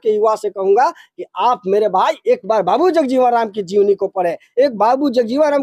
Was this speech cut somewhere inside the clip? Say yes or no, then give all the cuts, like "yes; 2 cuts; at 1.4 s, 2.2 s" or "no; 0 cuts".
no; 0 cuts